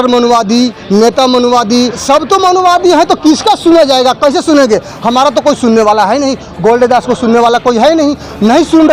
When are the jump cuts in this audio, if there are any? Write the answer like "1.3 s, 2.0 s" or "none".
2.0 s